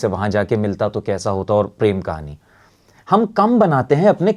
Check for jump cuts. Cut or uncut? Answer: uncut